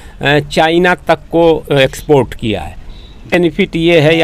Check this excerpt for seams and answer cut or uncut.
cut